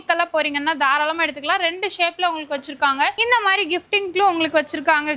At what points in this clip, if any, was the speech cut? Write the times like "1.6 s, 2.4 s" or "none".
3.2 s